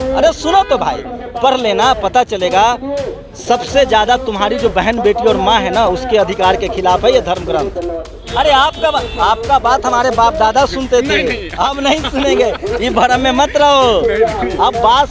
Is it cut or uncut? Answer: cut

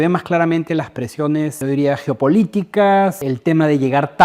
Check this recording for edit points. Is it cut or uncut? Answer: cut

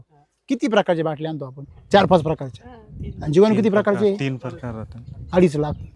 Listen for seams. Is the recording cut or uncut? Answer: uncut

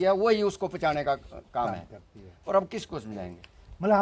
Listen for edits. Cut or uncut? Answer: uncut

